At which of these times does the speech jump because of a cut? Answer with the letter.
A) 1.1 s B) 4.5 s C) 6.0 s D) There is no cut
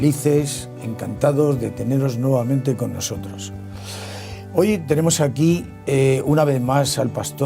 C